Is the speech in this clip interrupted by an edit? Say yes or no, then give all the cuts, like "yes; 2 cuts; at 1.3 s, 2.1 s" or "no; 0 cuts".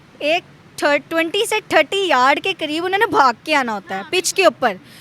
no; 0 cuts